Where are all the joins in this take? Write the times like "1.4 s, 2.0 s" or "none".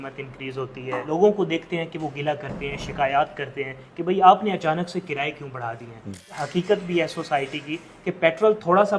1.0 s, 6.4 s